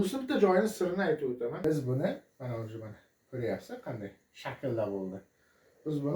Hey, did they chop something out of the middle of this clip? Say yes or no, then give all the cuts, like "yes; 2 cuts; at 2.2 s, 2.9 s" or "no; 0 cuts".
yes; 1 cut; at 1.6 s